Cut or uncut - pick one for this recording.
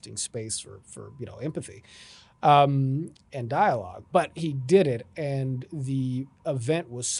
uncut